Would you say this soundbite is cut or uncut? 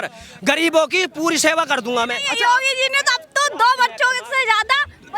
cut